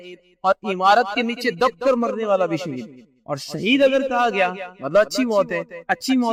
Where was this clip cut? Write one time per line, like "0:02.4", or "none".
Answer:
none